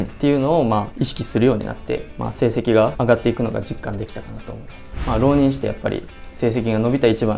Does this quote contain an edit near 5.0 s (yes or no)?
yes